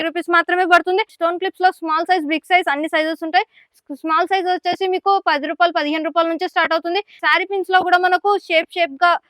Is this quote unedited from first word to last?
no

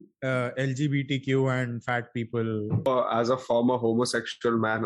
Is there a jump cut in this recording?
yes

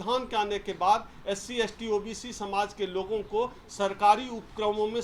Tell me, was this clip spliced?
no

